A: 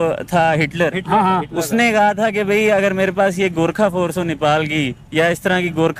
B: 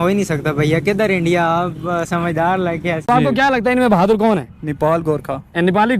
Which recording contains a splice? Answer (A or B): B